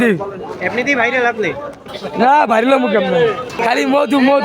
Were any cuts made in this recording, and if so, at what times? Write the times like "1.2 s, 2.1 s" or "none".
3.5 s